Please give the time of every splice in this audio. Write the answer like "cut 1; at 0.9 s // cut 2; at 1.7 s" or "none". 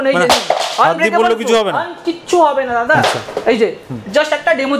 none